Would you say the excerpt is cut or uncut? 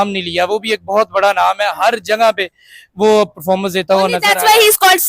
uncut